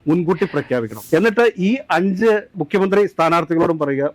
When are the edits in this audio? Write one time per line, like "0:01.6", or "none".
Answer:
0:01.0